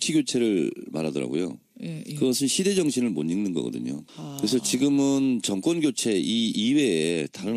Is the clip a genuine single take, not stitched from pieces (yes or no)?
yes